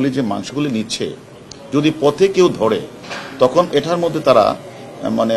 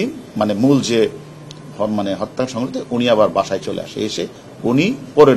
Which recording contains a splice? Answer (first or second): second